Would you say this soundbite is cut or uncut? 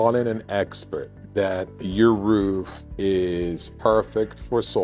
cut